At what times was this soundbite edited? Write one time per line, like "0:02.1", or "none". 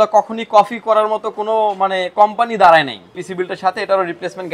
0:03.2